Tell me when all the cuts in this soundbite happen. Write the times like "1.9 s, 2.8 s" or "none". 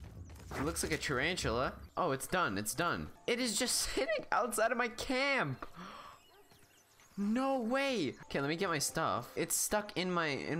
none